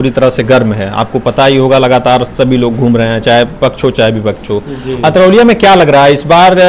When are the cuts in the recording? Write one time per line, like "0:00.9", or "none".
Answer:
none

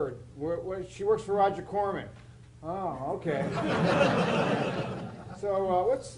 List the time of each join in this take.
0:04.8

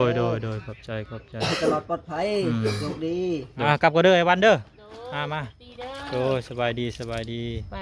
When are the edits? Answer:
0:03.5

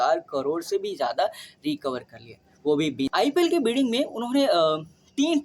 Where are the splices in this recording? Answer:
0:03.1

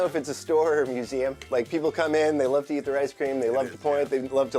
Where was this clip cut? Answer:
none

